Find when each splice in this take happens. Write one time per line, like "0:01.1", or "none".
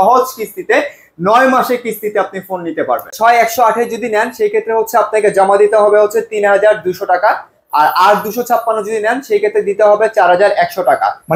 0:03.1